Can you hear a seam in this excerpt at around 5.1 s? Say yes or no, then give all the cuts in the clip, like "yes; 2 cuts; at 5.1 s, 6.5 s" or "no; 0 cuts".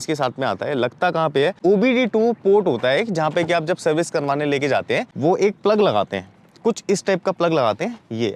yes; 2 cuts; at 1.6 s, 5.1 s